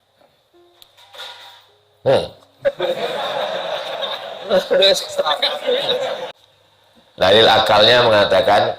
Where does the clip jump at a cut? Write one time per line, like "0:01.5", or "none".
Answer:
0:06.2

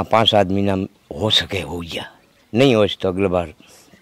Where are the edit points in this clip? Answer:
none

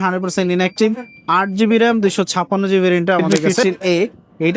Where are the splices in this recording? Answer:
0:03.3

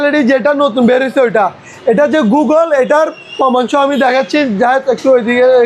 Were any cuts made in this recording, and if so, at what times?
none

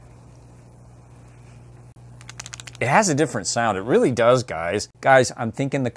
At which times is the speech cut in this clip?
0:01.9
0:04.9

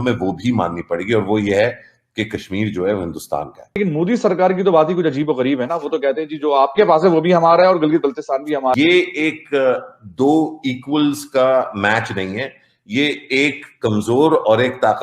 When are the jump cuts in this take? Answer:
0:03.8
0:08.8

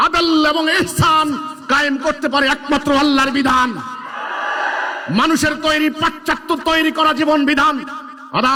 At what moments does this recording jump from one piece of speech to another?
none

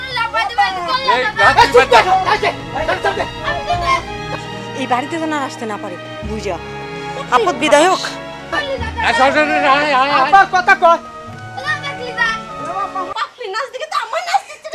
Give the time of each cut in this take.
0:13.1

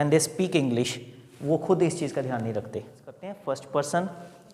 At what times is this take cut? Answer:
0:03.3

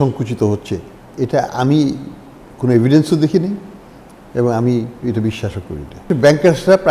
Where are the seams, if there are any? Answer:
0:01.0
0:06.1

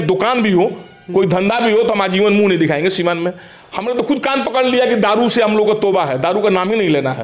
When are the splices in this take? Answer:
none

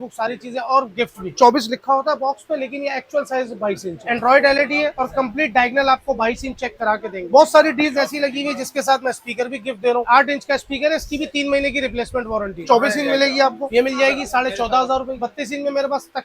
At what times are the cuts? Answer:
0:01.2
0:03.9
0:07.2
0:10.0
0:12.6
0:15.1

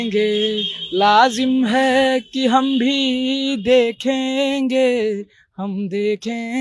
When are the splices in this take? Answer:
none

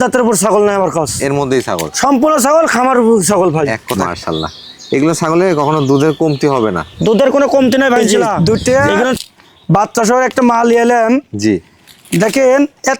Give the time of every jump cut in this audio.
0:03.9
0:08.0

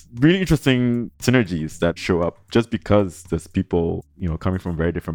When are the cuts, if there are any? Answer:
0:01.1
0:02.0
0:04.1

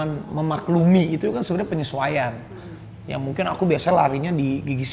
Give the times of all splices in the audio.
none

